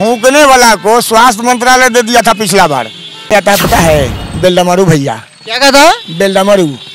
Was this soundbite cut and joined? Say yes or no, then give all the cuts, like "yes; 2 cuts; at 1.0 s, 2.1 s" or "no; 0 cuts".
yes; 1 cut; at 3.3 s